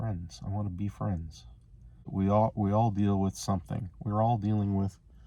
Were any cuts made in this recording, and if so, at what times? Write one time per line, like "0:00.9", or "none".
0:02.1